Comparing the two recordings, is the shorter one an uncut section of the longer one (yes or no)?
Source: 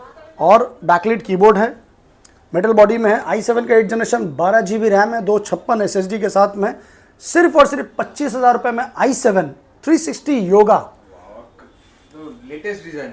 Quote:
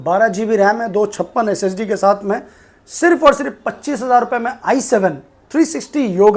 yes